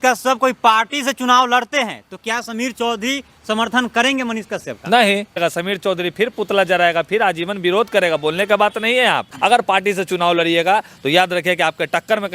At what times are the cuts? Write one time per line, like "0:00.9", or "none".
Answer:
0:05.4
0:09.3